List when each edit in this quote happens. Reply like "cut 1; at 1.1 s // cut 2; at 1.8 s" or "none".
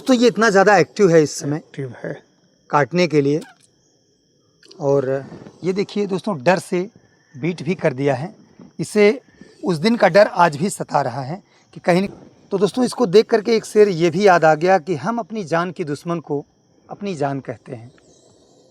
cut 1; at 12.1 s